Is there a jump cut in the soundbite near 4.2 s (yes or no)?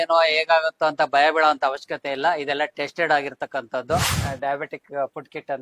yes